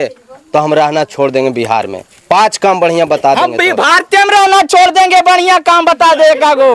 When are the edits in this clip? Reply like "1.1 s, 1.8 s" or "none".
none